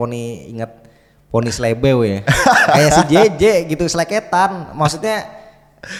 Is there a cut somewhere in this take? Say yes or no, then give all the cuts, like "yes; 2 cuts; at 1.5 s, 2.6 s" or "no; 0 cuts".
no; 0 cuts